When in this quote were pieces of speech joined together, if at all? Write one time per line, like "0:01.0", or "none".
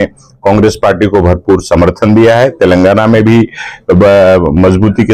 none